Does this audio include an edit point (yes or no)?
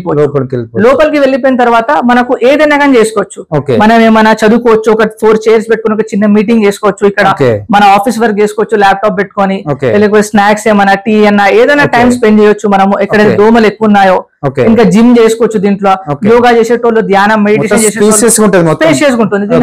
no